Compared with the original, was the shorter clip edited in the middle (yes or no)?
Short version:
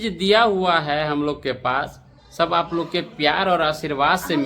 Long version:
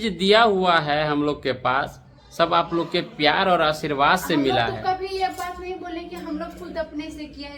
no